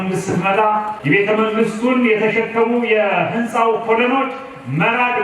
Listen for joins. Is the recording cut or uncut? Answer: cut